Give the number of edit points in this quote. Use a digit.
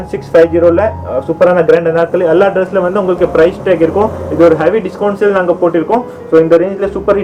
0